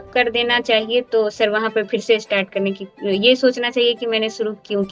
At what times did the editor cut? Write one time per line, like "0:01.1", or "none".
none